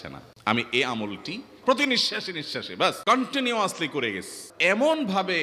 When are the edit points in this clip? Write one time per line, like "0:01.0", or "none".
0:01.5
0:03.0
0:04.5